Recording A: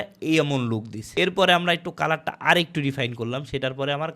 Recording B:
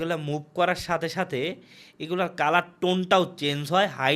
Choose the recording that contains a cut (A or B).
A